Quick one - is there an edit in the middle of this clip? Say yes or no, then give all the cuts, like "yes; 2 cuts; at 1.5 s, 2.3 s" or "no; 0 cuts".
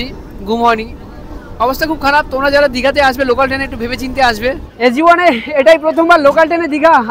yes; 1 cut; at 4.7 s